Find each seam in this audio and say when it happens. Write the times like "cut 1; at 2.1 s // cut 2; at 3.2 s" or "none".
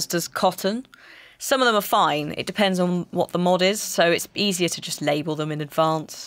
none